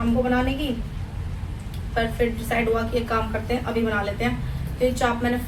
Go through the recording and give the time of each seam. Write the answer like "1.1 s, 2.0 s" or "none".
none